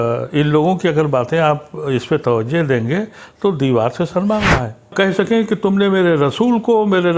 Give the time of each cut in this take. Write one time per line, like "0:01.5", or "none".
0:04.9